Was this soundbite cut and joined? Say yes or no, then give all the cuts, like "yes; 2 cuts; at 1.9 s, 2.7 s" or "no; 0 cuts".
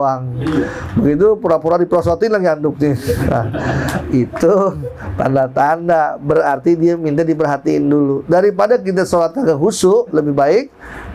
no; 0 cuts